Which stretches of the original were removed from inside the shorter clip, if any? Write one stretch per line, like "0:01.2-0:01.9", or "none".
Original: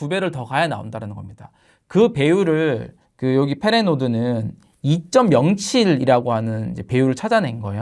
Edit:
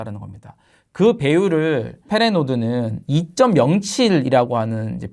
0:03.0-0:03.6
0:04.5-0:04.7